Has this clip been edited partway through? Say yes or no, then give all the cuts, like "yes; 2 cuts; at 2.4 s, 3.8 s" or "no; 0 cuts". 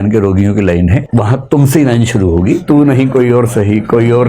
yes; 2 cuts; at 1.1 s, 2.6 s